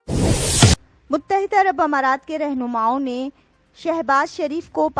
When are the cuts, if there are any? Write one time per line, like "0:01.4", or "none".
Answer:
0:00.9